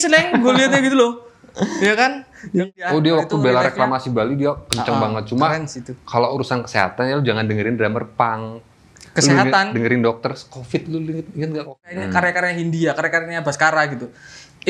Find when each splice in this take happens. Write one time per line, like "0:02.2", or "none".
0:02.6
0:11.9